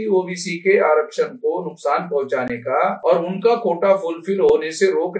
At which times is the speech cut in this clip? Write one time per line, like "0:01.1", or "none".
0:03.0